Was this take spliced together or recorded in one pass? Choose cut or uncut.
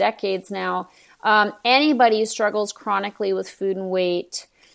uncut